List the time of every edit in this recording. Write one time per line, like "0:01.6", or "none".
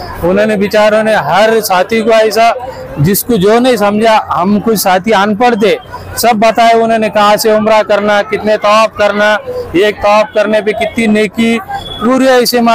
none